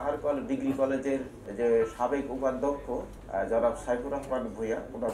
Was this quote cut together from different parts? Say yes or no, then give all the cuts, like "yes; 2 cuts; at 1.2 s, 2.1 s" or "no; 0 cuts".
yes; 2 cuts; at 1.4 s, 3.1 s